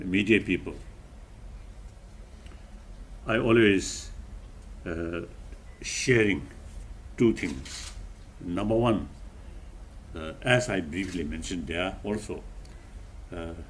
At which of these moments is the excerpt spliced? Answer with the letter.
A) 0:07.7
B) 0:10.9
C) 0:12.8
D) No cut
D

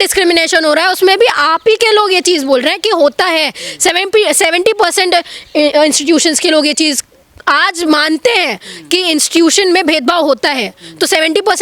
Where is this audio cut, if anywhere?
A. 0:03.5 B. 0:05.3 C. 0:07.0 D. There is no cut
D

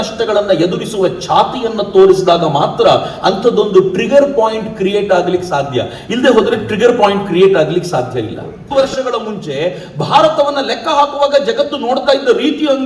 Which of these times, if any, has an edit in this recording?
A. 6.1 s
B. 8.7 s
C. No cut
B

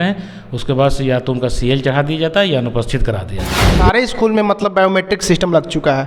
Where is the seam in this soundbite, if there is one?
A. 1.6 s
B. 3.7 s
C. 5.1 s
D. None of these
B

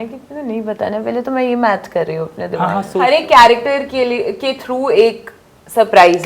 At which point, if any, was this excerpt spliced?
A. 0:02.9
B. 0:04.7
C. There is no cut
A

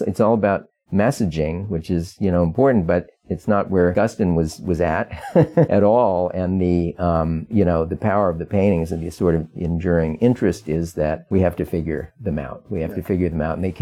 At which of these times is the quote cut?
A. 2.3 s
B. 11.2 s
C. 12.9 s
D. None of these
B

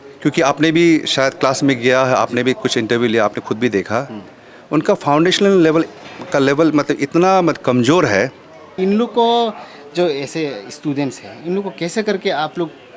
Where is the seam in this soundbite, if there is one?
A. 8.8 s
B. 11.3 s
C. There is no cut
A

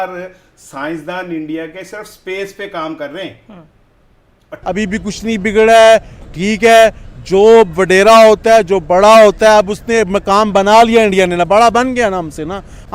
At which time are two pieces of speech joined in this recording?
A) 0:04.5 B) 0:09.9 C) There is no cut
A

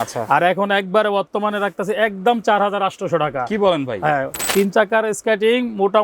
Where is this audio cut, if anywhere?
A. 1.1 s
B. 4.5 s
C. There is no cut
B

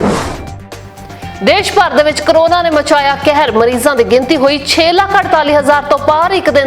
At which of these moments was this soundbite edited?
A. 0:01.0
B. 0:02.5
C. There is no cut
A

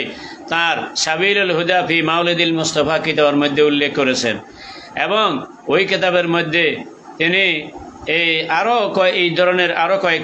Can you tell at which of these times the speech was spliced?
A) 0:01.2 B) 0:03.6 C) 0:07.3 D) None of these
D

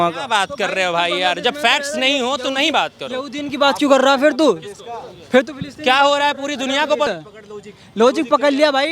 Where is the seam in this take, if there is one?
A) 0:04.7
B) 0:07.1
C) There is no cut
B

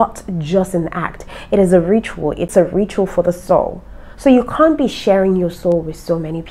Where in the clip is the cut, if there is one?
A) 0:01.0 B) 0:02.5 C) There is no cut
B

